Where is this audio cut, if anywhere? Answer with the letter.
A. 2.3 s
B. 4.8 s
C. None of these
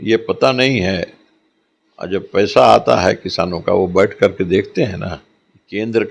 C